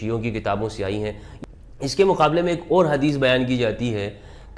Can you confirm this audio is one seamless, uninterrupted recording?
no; 1 cut; at 1.3 s

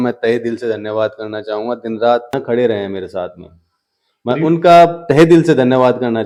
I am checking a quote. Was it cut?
no; 0 cuts

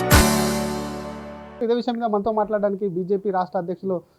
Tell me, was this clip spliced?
yes; 1 cut; at 1.6 s

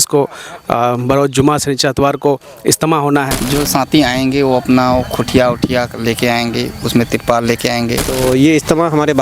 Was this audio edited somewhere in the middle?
yes; 2 cuts; at 3.6 s, 8.2 s

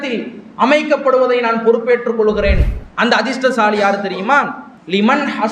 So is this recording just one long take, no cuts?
yes; 0 cuts

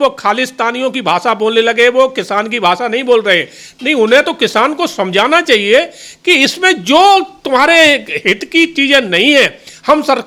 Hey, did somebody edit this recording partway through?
no; 0 cuts

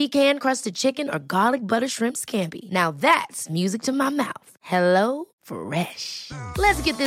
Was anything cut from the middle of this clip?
no; 0 cuts

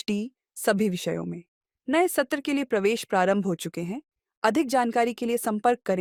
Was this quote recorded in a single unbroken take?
yes; 0 cuts

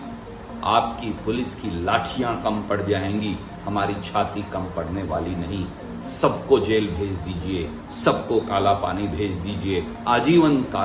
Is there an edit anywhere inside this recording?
no; 0 cuts

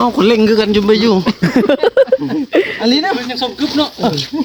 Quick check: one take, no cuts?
yes; 0 cuts

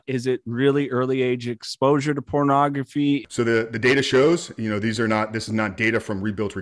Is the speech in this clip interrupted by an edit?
yes; 1 cut; at 3.2 s

